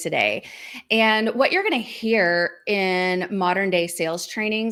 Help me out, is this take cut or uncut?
uncut